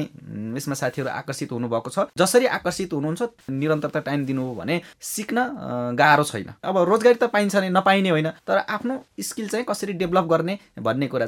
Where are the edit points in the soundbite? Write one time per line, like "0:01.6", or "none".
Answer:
0:02.1
0:06.6